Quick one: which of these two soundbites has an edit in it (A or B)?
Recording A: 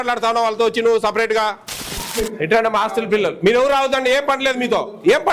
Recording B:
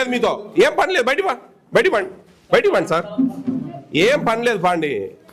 A